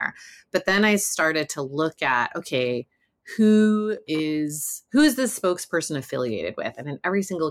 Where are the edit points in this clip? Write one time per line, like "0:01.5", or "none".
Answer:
none